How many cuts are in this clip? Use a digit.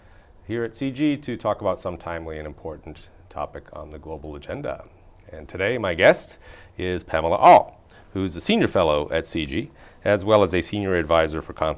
1